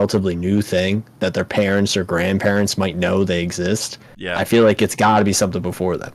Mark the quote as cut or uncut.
uncut